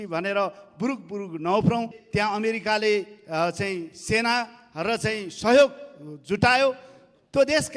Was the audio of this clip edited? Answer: yes; 1 cut; at 2.0 s

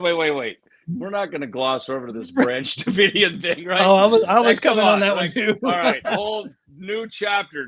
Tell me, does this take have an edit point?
no; 0 cuts

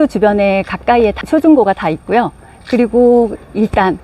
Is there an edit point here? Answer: yes; 1 cut; at 1.2 s

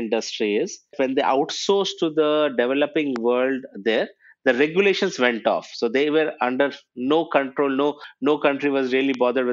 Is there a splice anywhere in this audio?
yes; 1 cut; at 0.9 s

